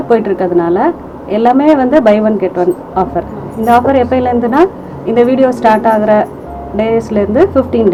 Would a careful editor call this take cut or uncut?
uncut